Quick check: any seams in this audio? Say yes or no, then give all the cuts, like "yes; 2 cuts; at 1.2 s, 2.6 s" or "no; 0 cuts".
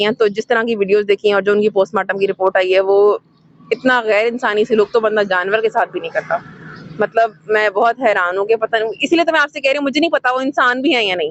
no; 0 cuts